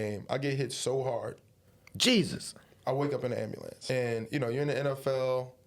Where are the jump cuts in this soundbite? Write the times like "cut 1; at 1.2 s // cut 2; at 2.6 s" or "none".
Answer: cut 1; at 3.8 s